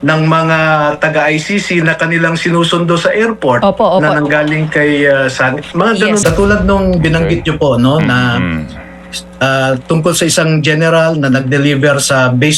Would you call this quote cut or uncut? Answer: cut